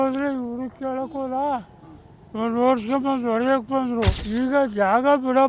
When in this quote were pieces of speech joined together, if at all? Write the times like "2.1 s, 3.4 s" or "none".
4.2 s